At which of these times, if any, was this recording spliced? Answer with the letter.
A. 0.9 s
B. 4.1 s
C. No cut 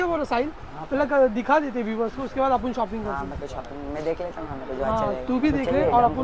C